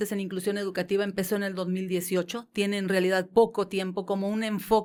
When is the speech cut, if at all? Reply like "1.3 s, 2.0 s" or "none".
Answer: none